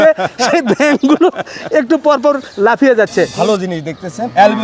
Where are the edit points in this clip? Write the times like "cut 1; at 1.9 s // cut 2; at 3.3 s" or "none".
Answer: cut 1; at 3.3 s